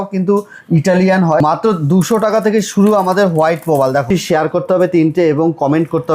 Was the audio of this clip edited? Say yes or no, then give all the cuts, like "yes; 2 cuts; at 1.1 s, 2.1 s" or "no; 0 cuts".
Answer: yes; 2 cuts; at 1.4 s, 4.1 s